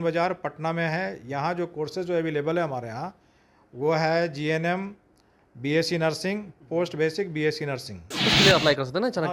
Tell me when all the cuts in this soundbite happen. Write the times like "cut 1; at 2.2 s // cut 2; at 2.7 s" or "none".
cut 1; at 8.3 s

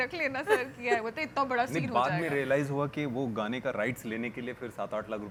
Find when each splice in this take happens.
none

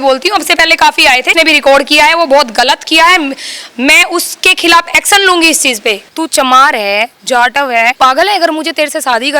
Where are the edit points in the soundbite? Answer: cut 1; at 1.3 s // cut 2; at 6.1 s // cut 3; at 8.0 s

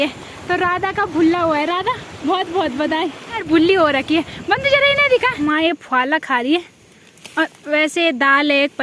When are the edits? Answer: cut 1; at 3.4 s // cut 2; at 5.4 s

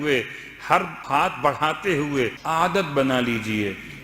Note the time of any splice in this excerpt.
cut 1; at 1.0 s // cut 2; at 2.4 s

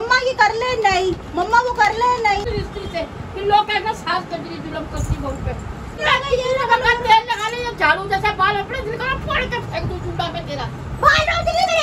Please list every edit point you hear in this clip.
cut 1; at 2.4 s // cut 2; at 5.0 s // cut 3; at 6.0 s

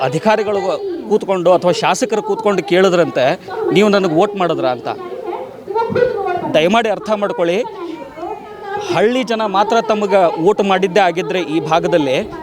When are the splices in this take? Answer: none

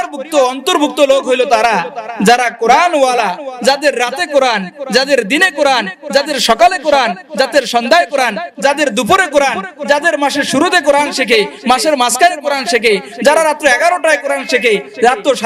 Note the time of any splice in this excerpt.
none

